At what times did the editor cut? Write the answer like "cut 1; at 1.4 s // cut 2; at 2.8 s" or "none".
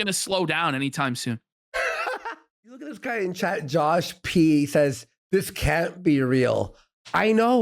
cut 1; at 3.0 s